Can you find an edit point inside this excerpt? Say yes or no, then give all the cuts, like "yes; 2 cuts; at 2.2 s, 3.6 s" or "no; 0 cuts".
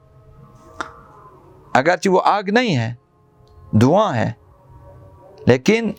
no; 0 cuts